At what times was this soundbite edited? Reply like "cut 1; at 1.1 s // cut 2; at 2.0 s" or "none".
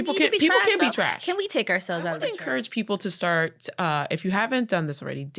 cut 1; at 2.3 s